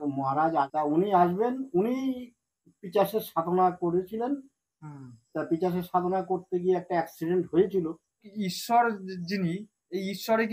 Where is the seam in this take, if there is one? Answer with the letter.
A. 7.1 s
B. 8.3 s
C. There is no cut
B